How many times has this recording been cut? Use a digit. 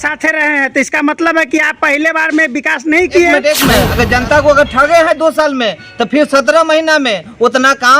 1